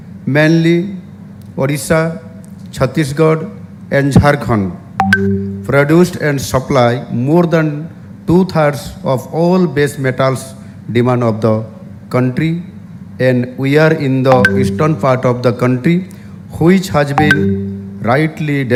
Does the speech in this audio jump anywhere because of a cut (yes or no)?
no